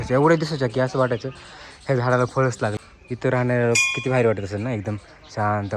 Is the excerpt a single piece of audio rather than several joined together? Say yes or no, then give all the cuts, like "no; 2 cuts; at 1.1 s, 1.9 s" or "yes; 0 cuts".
no; 1 cut; at 2.8 s